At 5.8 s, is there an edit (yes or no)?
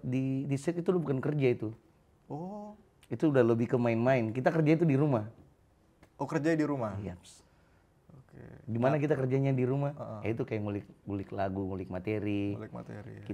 no